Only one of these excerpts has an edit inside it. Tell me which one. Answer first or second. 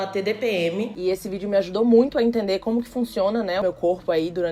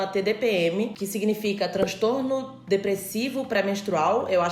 first